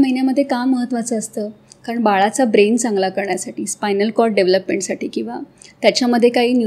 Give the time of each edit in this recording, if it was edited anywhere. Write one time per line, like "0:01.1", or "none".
none